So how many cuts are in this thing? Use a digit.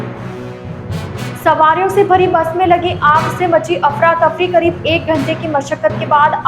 1